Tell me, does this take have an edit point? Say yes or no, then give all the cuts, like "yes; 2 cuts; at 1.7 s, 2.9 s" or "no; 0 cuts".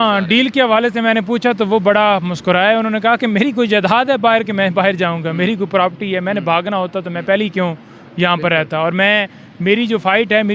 no; 0 cuts